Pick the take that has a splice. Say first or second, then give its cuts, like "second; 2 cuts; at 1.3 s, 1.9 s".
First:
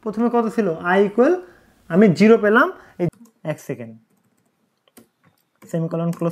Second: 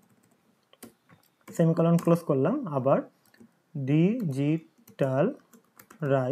first; 1 cut; at 3.0 s